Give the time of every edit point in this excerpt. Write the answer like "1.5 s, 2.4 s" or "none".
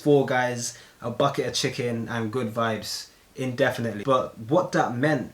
4.0 s